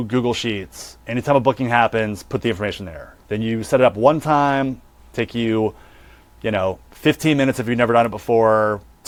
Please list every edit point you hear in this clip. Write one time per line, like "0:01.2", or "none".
none